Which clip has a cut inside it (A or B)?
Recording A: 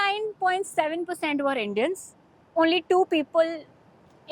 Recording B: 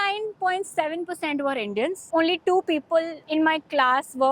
B